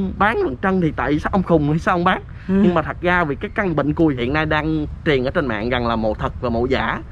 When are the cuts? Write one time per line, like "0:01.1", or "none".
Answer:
0:03.9